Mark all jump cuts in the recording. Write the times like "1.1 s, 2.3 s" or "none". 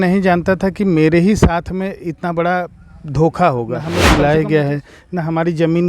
3.9 s